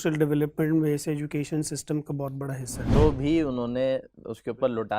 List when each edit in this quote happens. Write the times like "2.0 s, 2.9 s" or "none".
2.9 s